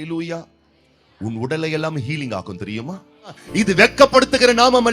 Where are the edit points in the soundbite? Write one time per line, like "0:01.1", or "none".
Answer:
0:03.4